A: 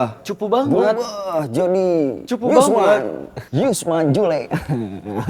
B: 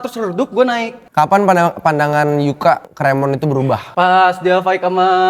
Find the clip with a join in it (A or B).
B